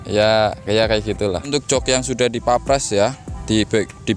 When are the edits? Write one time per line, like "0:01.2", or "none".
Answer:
0:01.5